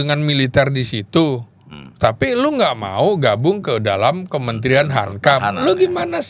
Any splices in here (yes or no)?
no